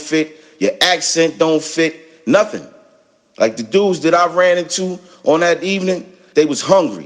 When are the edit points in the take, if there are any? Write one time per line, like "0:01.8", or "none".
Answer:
0:06.1